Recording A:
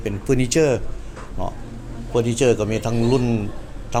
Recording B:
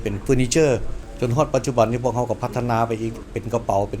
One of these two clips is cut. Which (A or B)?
B